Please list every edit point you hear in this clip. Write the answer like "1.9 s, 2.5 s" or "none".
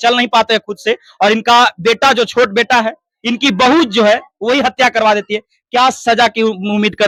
none

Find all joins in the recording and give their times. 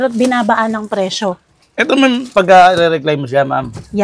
none

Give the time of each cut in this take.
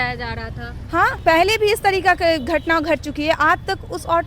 1.2 s

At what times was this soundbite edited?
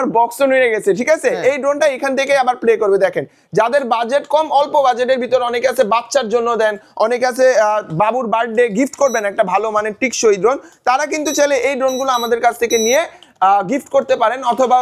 none

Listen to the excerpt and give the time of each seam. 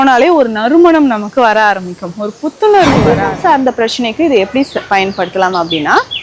3.1 s

